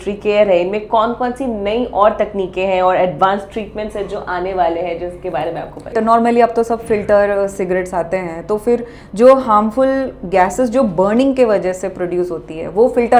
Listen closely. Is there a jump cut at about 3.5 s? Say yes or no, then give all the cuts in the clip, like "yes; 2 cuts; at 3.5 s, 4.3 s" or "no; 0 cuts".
no; 1 cut; at 5.9 s